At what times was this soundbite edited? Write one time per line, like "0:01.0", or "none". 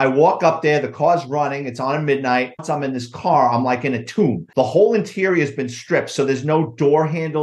0:02.6